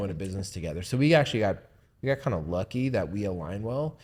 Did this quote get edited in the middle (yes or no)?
no